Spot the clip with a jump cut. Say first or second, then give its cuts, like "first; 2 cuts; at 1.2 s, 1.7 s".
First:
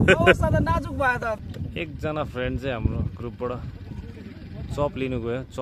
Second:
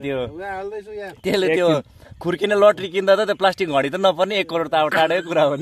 first; 1 cut; at 1.4 s